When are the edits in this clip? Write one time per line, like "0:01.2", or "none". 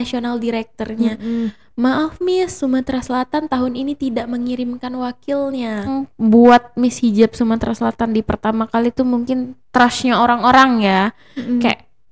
0:05.9